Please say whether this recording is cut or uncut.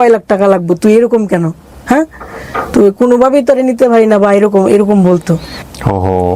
uncut